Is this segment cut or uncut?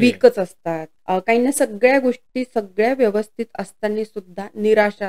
cut